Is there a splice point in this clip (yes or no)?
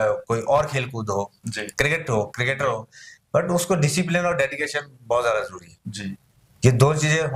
no